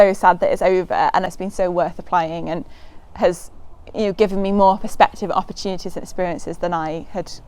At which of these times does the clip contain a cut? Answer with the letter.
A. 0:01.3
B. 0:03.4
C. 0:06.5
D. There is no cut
A